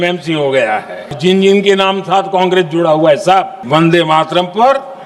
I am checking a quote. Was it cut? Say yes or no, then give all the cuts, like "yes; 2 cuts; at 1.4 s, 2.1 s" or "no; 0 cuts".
yes; 2 cuts; at 1.2 s, 3.6 s